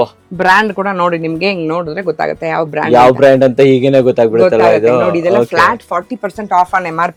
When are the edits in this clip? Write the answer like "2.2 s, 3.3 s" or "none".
none